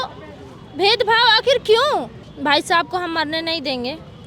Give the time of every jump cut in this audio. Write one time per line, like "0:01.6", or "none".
0:02.3